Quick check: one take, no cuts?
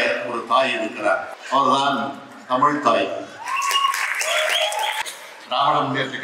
no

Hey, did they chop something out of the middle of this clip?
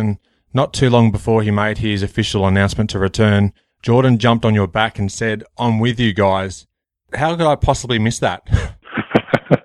no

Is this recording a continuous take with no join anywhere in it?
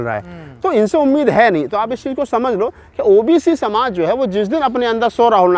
no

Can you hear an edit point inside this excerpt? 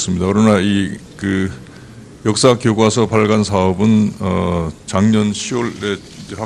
yes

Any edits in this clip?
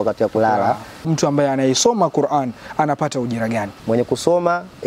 yes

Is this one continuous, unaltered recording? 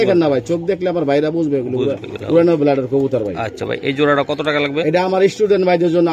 yes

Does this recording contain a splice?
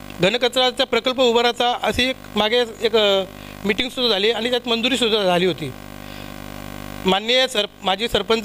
no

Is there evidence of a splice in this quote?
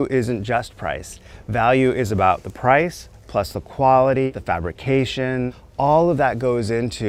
no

